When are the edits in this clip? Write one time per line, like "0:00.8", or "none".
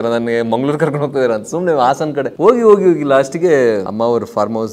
0:02.3
0:03.9